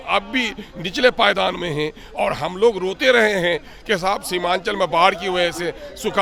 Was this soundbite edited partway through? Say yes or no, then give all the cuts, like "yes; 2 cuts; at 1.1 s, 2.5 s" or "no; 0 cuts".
no; 0 cuts